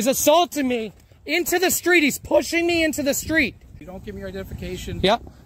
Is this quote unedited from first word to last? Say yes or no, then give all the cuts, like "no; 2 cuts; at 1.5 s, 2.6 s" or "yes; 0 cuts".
no; 1 cut; at 3.7 s